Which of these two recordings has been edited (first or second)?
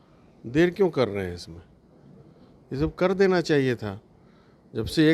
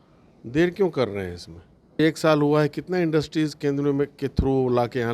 second